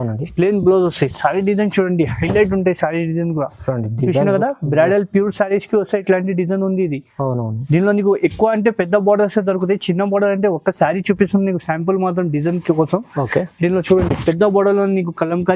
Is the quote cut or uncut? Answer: uncut